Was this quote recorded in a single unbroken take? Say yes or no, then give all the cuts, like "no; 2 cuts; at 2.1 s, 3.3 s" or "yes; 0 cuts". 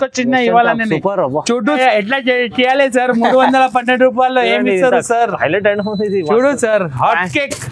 no; 1 cut; at 1.8 s